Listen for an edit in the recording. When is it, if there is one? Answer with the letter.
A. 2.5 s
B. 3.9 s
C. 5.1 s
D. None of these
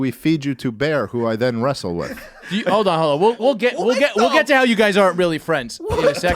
A